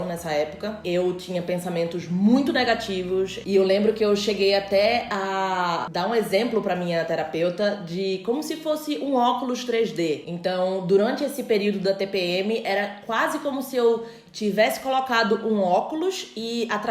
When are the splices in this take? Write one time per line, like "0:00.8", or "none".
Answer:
none